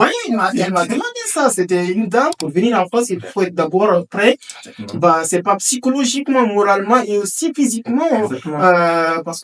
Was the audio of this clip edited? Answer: yes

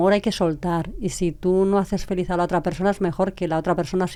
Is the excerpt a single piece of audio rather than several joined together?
yes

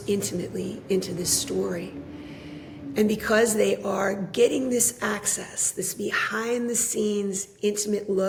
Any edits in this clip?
no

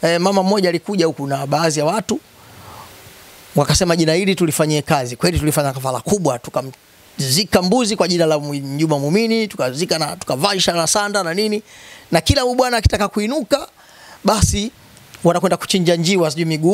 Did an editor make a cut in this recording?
no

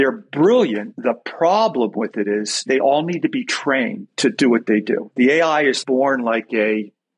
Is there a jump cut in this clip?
yes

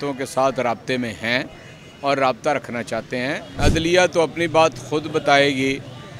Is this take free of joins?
no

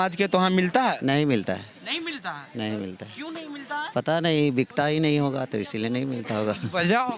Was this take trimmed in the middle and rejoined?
no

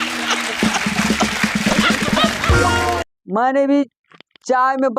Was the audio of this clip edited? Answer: yes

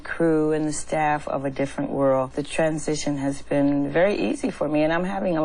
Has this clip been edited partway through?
yes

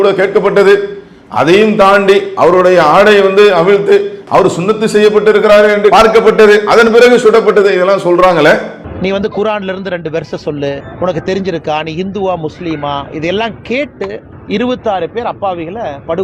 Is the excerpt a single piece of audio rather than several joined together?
yes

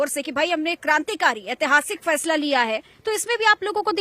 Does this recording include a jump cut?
no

